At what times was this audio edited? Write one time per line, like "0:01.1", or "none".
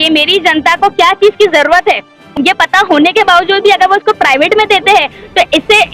0:02.4